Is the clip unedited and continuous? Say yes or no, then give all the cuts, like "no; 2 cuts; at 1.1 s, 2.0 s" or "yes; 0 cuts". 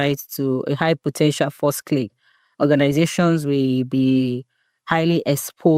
yes; 0 cuts